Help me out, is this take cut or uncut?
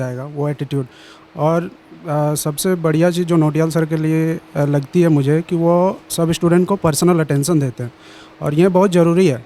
uncut